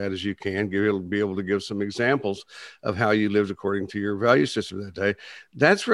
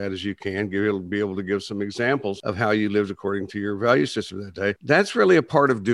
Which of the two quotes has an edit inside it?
second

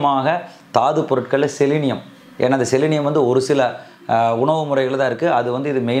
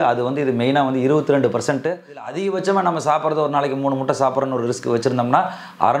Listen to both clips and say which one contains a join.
second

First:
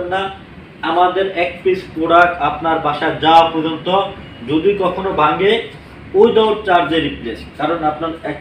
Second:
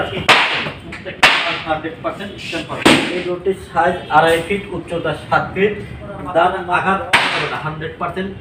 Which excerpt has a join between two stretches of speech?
second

